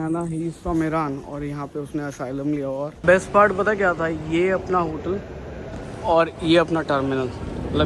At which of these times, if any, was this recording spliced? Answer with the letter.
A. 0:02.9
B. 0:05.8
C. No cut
A